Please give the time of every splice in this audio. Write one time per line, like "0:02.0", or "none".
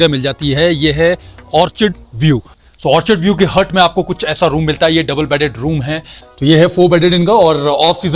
0:02.5
0:06.3